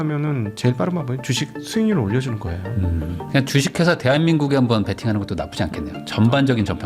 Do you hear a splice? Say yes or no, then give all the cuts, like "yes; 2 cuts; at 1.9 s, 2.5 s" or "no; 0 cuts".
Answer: yes; 1 cut; at 3.1 s